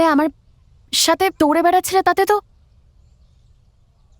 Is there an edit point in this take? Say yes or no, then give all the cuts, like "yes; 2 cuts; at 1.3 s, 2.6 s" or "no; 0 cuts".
no; 0 cuts